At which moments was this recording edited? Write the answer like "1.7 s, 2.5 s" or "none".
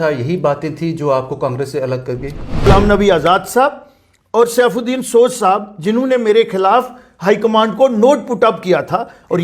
2.7 s